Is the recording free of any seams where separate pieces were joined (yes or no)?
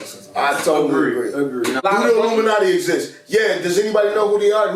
no